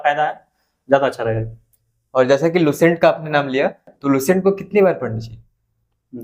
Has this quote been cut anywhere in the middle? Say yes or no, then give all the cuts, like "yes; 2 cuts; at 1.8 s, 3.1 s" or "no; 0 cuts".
no; 0 cuts